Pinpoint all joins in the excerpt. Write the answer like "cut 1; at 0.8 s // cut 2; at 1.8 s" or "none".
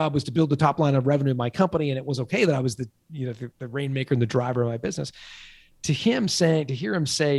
none